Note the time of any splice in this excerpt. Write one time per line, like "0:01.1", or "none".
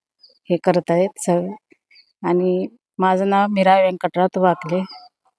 0:02.8

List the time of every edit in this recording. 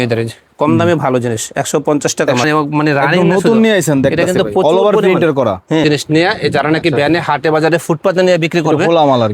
0:02.4
0:05.8

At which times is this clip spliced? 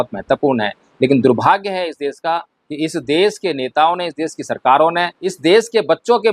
0:05.2

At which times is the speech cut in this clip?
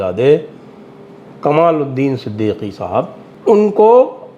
0:03.2

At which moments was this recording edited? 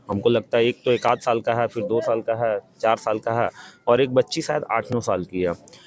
none

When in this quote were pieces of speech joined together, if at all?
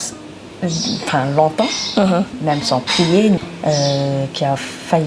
0:03.4

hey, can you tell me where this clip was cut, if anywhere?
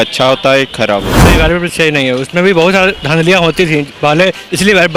0:01.2

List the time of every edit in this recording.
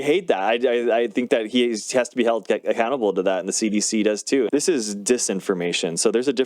0:04.5

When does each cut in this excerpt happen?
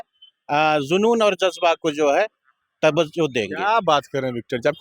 none

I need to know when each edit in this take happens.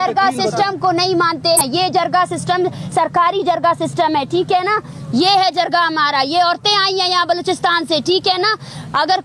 0:01.6

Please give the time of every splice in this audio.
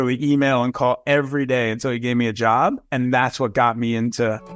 none

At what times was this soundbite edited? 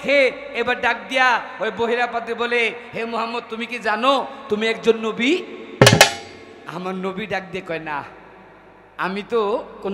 none

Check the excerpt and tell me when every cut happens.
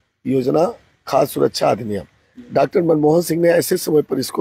none

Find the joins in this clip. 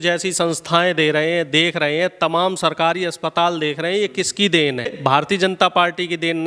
0:05.0

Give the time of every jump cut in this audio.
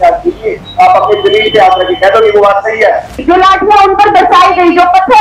0:03.2

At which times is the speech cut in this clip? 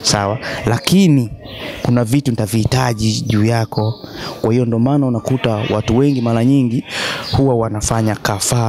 none

